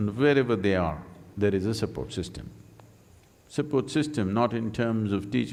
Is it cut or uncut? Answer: uncut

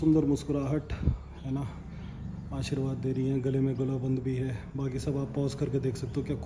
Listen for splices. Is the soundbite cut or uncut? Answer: uncut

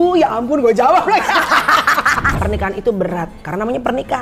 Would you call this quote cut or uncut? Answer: cut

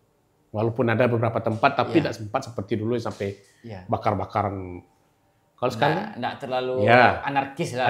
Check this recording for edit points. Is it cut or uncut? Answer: uncut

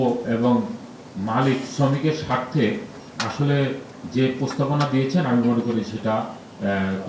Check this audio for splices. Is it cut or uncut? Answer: uncut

